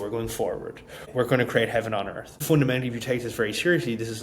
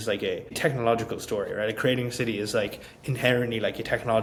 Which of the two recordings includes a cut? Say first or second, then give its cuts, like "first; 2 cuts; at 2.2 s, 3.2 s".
first; 2 cuts; at 1.0 s, 2.4 s